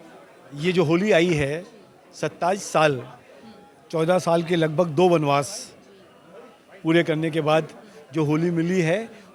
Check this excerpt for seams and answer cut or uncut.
uncut